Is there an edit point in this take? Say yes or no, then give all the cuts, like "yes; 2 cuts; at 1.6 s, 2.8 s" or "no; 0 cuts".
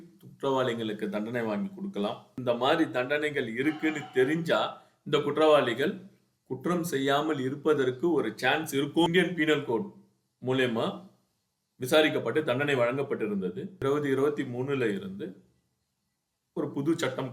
yes; 3 cuts; at 2.4 s, 9.1 s, 13.7 s